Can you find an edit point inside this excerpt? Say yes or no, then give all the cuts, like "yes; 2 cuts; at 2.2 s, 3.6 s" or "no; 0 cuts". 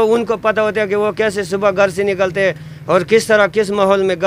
no; 0 cuts